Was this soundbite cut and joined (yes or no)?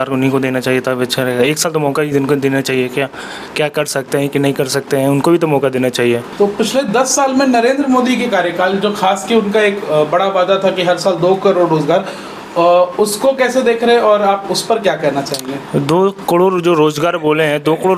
no